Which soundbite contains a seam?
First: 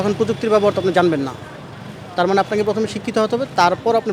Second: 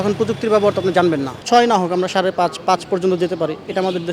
second; 1 cut; at 1.3 s

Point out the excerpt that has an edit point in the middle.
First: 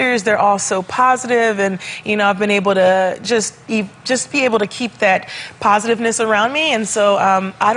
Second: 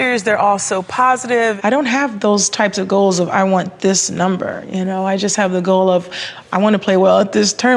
second; 1 cut; at 1.6 s

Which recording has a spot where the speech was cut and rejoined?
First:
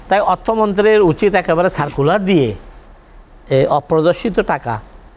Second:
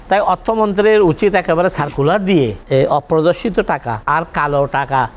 second; 2 cuts; at 2.6 s, 3.9 s

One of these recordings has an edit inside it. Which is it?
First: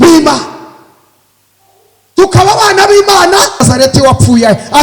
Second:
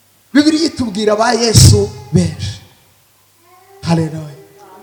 first; 1 cut; at 3.6 s

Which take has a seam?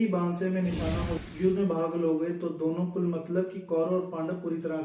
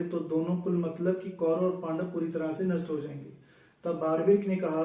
first; 1 cut; at 1.1 s

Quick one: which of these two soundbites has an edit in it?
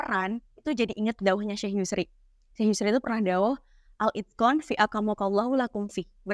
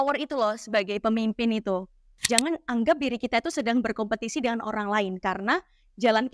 second; 1 cut; at 2.3 s

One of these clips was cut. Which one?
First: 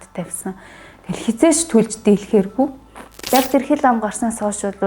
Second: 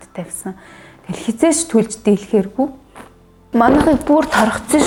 first; 1 cut; at 3.3 s

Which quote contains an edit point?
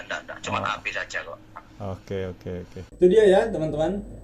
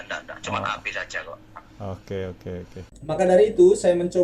second; 1 cut; at 2.8 s

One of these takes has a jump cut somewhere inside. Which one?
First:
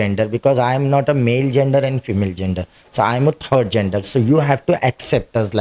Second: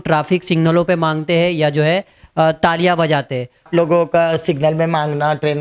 second; 1 cut; at 3.6 s

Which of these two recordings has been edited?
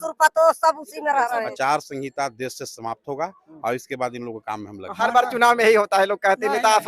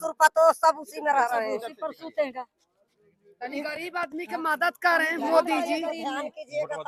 first; 1 cut; at 1.5 s

